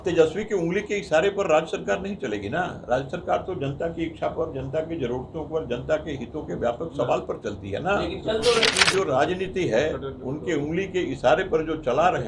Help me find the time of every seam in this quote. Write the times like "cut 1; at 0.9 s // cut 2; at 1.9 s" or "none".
cut 1; at 8.7 s